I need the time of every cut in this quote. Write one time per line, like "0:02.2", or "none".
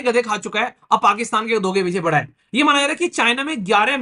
none